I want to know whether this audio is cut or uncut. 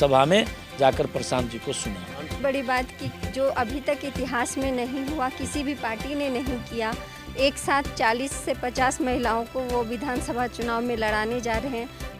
cut